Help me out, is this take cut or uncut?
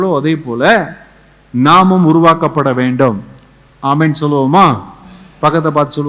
uncut